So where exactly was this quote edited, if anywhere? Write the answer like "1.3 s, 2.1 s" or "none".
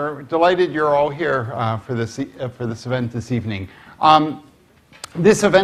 none

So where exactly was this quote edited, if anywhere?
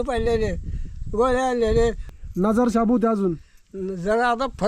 2.1 s

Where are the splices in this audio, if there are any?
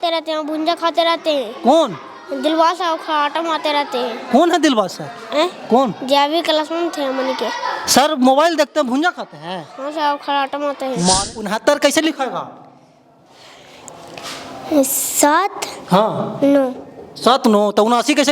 11.5 s

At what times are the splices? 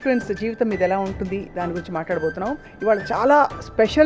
2.7 s

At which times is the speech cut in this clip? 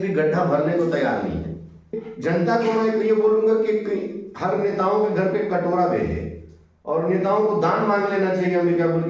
2.0 s

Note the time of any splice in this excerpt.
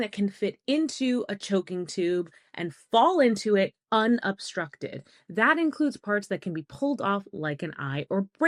none

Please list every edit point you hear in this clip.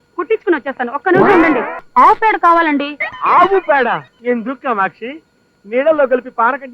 1.8 s, 4.1 s

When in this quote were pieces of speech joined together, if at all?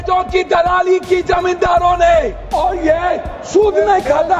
2.4 s

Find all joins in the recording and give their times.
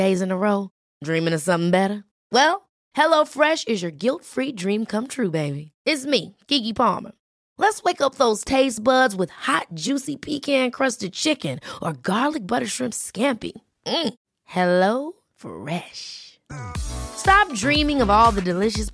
none

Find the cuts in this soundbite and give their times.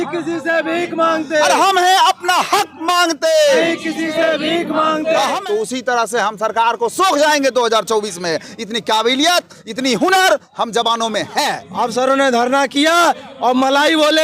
5.4 s, 11.6 s

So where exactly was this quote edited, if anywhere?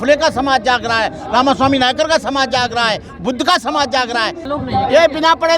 4.5 s

